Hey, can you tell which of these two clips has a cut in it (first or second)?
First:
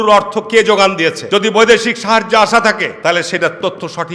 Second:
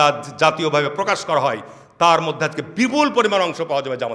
first